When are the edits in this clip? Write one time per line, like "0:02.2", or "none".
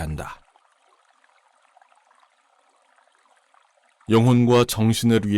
0:01.0
0:04.0